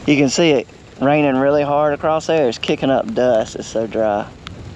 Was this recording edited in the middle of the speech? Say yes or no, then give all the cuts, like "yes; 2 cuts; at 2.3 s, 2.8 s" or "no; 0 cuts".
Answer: no; 0 cuts